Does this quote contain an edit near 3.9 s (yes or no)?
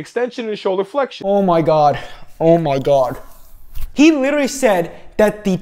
yes